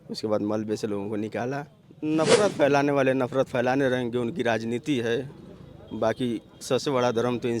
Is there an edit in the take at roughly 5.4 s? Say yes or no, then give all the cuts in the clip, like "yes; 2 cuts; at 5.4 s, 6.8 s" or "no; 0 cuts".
no; 1 cut; at 1.8 s